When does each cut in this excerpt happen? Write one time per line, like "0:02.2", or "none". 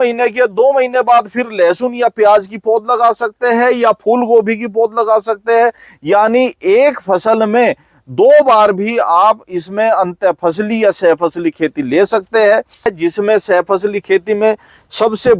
0:12.9

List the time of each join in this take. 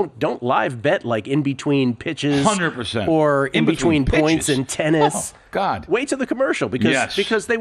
none

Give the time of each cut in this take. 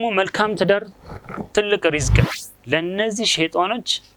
0:02.2

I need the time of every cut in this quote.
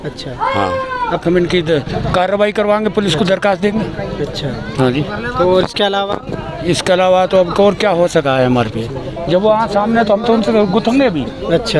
0:01.2

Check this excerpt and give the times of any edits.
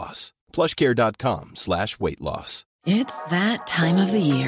0:02.7

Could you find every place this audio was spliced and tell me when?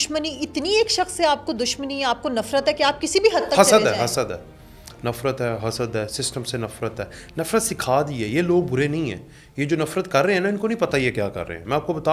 none

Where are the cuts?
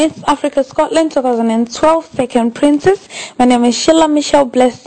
0:01.3

